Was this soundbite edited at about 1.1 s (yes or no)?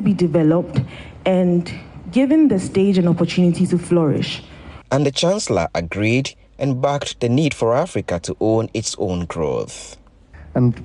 no